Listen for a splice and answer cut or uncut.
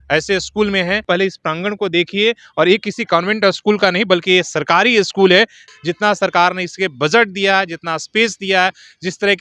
cut